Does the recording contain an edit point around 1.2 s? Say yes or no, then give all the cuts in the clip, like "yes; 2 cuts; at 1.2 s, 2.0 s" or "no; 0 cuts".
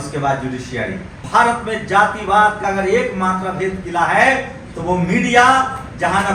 yes; 1 cut; at 1.2 s